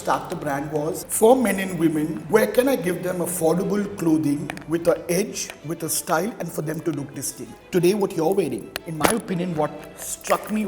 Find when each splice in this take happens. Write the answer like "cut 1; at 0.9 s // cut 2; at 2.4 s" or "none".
cut 1; at 1.1 s // cut 2; at 2.2 s // cut 3; at 7.5 s